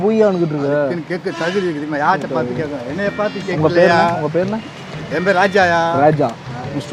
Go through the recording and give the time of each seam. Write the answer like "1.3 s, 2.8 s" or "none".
none